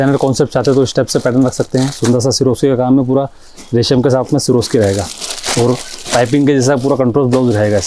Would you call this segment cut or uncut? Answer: uncut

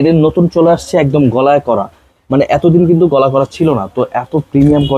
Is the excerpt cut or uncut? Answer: uncut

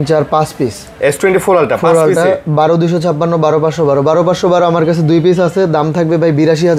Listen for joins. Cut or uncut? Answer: uncut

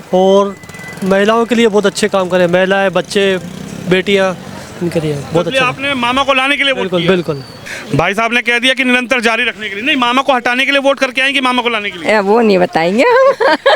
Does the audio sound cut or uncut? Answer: cut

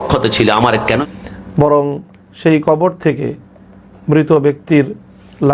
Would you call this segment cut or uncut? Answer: cut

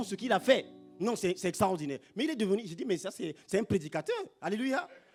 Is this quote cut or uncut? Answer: uncut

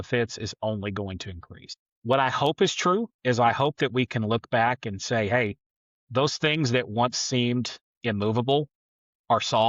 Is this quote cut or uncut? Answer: cut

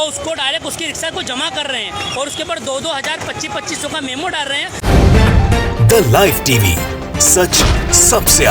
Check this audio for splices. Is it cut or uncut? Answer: cut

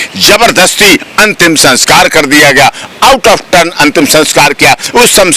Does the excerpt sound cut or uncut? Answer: uncut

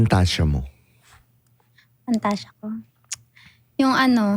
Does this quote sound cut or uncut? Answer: uncut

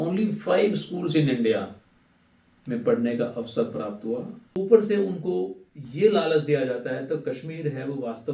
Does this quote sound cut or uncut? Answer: cut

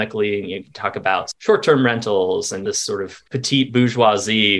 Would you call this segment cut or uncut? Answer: cut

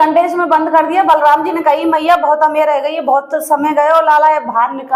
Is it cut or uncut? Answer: uncut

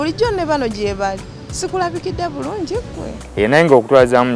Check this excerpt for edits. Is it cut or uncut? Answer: cut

